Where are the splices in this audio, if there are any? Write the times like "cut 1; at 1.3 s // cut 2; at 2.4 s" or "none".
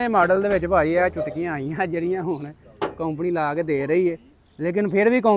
none